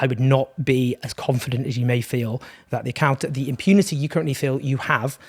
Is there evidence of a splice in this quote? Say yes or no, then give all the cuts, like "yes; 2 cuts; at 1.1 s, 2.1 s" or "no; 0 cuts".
no; 0 cuts